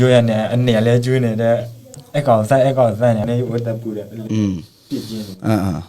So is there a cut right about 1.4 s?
no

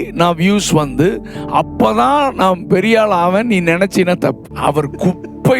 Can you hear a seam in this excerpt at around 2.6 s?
no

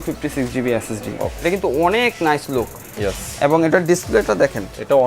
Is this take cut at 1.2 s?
yes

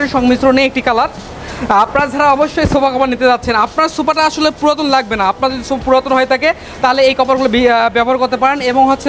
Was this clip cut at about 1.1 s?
no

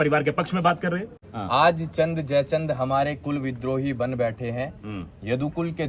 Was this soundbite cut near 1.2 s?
yes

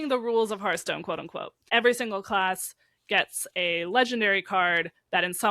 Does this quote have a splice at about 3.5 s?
no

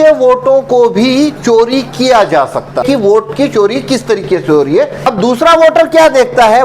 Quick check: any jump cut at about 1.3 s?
no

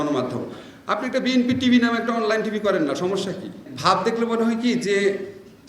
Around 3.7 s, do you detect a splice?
yes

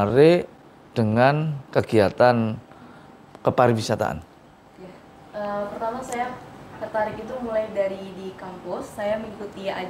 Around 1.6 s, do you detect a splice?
yes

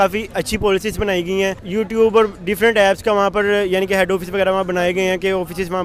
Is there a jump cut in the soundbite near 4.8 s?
no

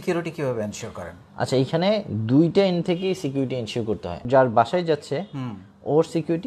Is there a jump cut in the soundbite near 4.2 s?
yes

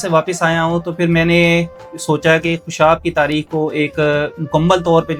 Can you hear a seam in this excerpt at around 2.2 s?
no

